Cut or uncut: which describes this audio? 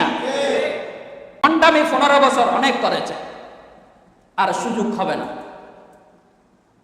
cut